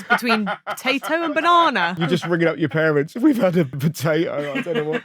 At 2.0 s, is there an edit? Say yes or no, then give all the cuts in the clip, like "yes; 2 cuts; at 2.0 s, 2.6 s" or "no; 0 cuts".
no; 1 cut; at 3.8 s